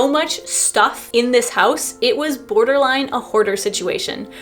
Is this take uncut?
no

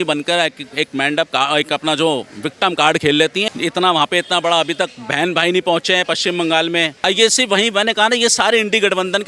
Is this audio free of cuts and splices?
no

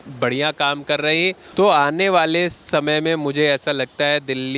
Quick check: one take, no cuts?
no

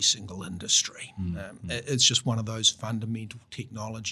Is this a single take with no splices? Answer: yes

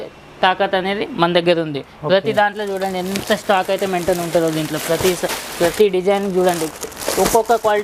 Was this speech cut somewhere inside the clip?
no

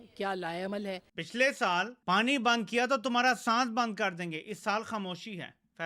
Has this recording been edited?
yes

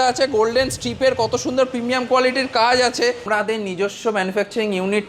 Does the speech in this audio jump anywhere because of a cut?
yes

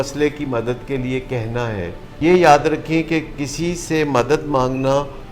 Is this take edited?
yes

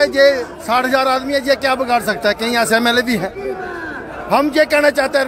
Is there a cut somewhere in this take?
no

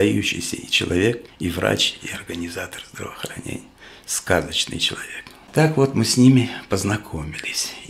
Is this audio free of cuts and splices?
no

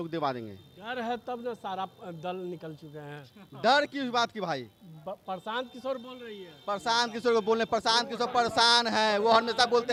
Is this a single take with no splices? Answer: yes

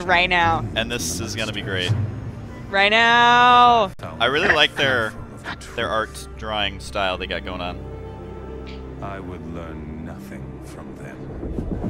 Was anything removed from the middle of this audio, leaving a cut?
no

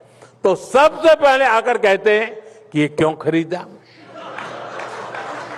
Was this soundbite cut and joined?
no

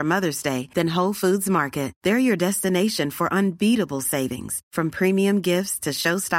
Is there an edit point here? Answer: no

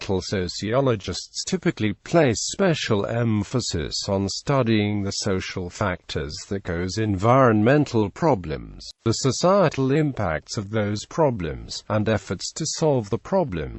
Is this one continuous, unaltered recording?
no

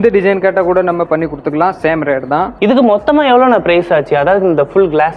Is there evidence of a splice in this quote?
no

